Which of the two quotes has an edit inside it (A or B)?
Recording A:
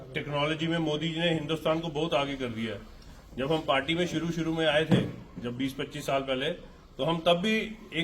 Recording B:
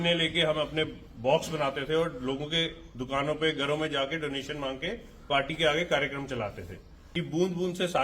B